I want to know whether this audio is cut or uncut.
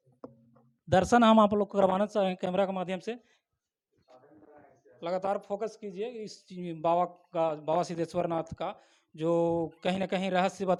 uncut